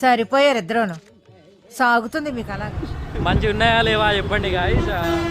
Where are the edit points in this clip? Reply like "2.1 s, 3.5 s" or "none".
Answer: 2.6 s